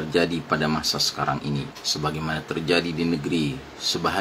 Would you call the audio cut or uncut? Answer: cut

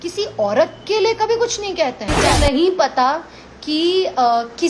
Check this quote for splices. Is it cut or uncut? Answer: cut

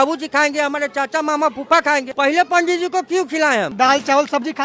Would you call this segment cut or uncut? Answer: cut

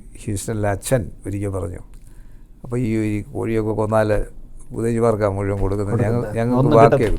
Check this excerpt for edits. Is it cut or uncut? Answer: uncut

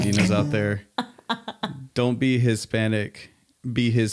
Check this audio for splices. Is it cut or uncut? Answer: uncut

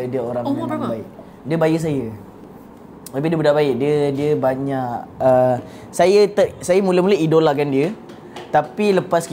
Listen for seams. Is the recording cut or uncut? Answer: uncut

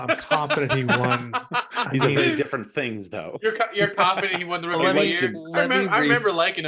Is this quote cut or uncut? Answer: uncut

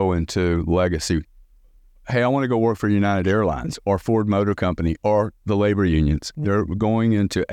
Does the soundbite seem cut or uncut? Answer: uncut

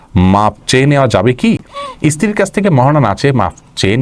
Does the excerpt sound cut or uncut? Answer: uncut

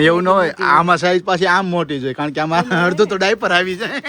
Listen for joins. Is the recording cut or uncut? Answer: uncut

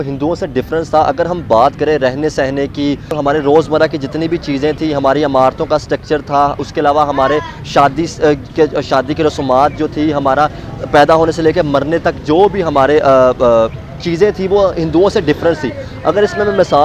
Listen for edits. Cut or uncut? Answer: uncut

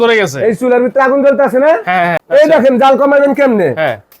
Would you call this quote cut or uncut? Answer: cut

